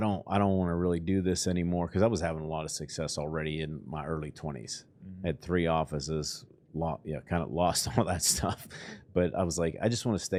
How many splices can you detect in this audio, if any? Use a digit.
0